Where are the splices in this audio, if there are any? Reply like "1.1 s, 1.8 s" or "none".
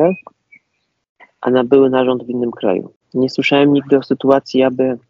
3.0 s